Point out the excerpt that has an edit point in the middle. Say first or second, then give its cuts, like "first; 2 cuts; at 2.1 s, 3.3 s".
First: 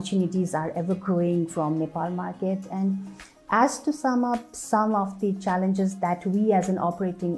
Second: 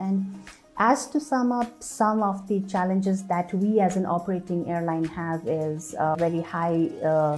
second; 1 cut; at 6.2 s